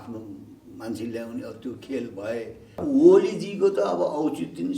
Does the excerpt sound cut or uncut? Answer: cut